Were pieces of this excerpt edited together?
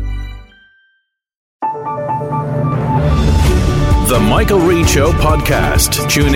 yes; 1 cut; at 1.4 s

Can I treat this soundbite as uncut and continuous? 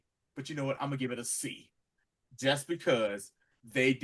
yes; 0 cuts

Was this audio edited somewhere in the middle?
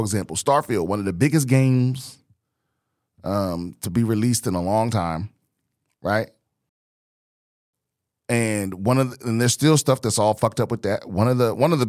no; 0 cuts

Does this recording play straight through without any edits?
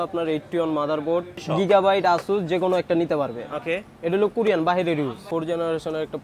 no; 2 cuts; at 1.3 s, 5.2 s

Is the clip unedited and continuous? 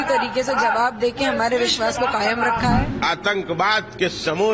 no; 1 cut; at 2.9 s

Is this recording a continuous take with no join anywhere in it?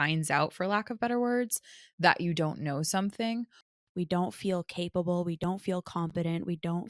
no; 1 cut; at 3.7 s

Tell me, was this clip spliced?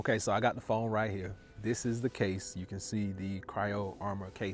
no; 0 cuts

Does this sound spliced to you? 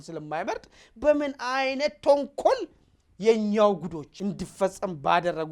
yes; 1 cut; at 4.1 s

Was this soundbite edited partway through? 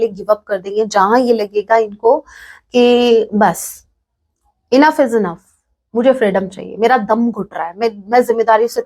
no; 0 cuts

